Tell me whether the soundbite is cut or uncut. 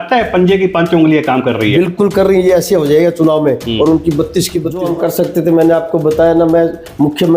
cut